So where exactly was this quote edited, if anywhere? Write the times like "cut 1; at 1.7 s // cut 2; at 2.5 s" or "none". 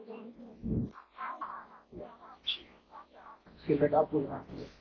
none